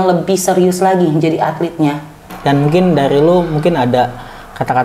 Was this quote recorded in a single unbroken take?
no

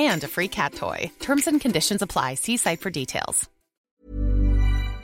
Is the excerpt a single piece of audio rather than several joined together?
no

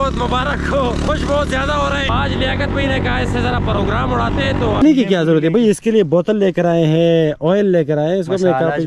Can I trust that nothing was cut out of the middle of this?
no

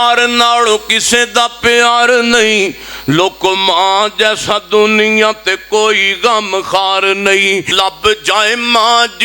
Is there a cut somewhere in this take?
yes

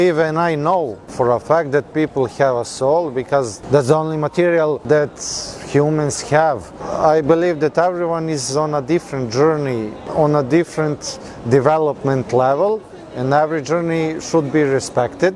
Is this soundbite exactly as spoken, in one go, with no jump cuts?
no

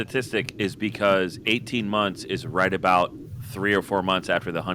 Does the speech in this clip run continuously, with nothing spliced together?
yes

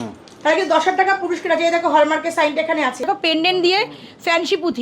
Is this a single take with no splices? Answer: no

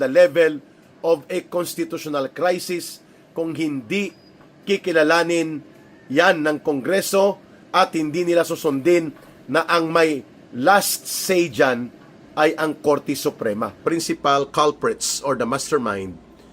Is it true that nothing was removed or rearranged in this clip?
no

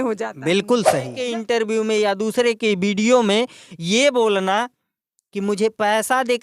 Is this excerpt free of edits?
no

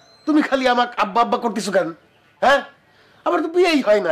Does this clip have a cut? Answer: no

